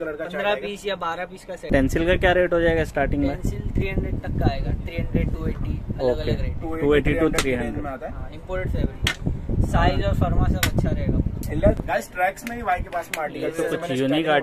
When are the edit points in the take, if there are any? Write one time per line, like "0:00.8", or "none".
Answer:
0:01.7
0:11.8